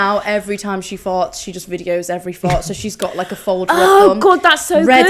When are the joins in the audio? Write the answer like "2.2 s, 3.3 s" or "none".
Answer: none